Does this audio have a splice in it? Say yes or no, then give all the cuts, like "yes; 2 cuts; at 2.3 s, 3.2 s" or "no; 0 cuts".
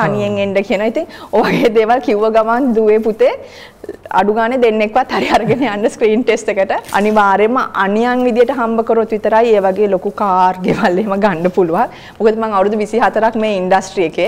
yes; 1 cut; at 6.8 s